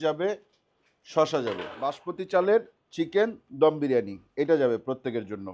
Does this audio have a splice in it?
yes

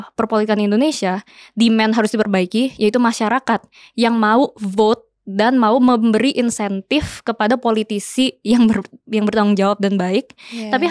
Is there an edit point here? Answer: no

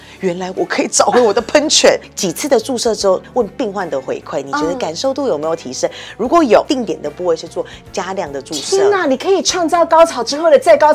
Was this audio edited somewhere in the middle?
yes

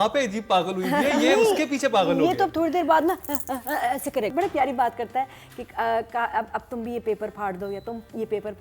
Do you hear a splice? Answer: yes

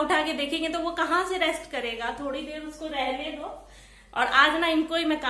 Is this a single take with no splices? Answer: yes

